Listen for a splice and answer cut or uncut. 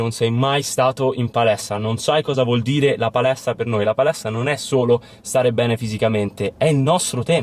cut